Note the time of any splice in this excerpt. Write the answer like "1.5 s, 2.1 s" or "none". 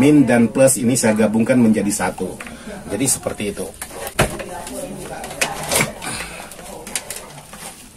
none